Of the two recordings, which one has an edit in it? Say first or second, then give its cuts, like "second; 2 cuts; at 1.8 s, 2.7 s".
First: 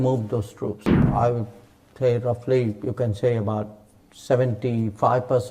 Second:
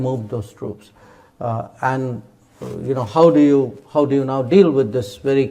first; 1 cut; at 1.1 s